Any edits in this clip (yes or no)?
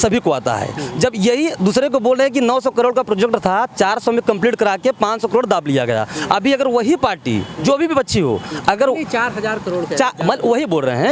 no